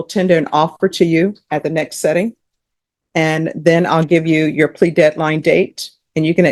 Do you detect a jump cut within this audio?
no; 0 cuts

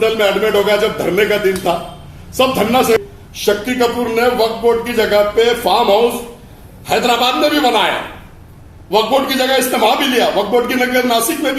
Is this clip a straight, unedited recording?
no; 1 cut; at 3.0 s

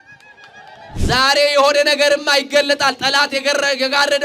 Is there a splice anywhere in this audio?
yes; 1 cut; at 0.9 s

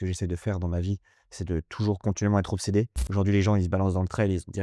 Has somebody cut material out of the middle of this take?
yes; 1 cut; at 3.0 s

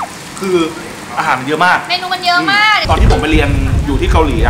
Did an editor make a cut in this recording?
yes; 1 cut; at 2.8 s

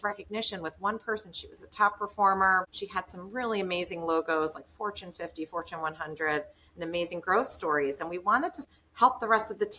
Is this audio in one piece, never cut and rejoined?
no; 2 cuts; at 2.8 s, 8.6 s

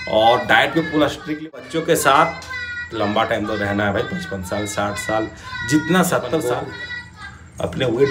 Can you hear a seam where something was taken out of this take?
yes; 2 cuts; at 1.5 s, 6.4 s

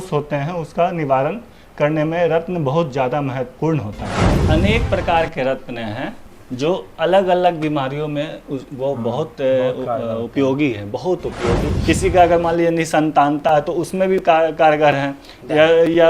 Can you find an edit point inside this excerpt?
yes; 2 cuts; at 4.3 s, 11.7 s

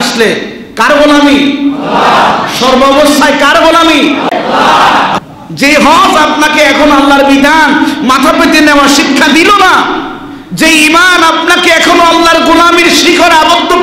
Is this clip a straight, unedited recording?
no; 2 cuts; at 4.3 s, 5.2 s

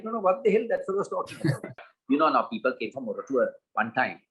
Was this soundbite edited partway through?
yes; 1 cut; at 1.9 s

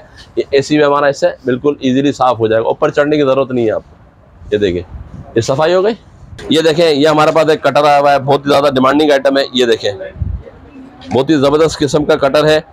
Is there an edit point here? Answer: yes; 1 cut; at 6.4 s

